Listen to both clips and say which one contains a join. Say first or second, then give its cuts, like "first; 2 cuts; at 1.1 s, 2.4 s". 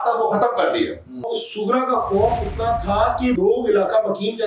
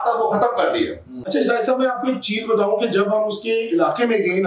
first; 2 cuts; at 1.3 s, 3.4 s